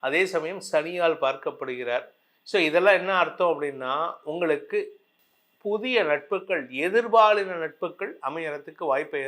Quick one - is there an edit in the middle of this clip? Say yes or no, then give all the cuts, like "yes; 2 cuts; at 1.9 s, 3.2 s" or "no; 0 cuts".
no; 0 cuts